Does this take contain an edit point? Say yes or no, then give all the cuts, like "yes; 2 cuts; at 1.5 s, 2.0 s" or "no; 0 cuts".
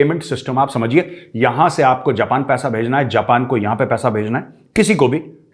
no; 0 cuts